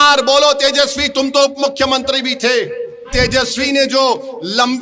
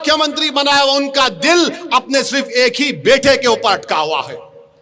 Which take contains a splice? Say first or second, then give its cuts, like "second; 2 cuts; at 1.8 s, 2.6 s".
first; 1 cut; at 3.1 s